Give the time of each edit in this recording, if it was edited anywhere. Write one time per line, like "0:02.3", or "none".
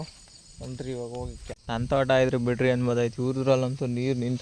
0:01.4